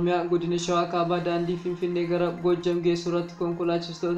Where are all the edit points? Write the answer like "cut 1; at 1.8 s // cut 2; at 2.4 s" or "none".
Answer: none

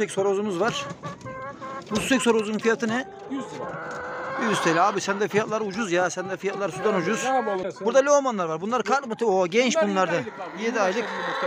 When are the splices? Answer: cut 1; at 7.7 s

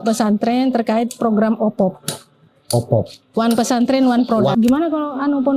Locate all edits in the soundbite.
cut 1; at 4.5 s

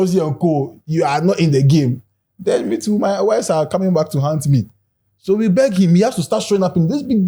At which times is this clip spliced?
none

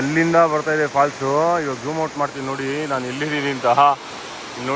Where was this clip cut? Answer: none

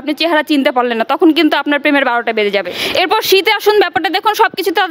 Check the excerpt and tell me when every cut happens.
cut 1; at 2.8 s

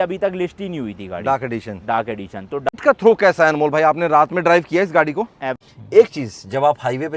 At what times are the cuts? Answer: cut 1; at 2.7 s // cut 2; at 5.5 s

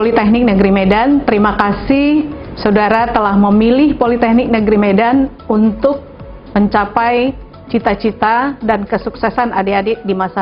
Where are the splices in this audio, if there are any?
none

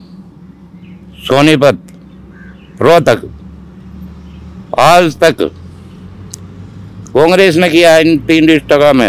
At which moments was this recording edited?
none

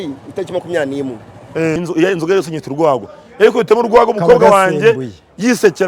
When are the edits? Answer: cut 1; at 1.8 s

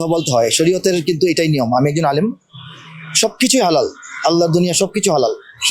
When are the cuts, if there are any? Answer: none

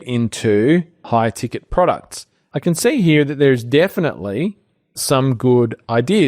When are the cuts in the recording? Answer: cut 1; at 1.0 s // cut 2; at 2.4 s // cut 3; at 5.0 s

